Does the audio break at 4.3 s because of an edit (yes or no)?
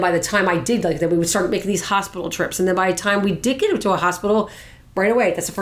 no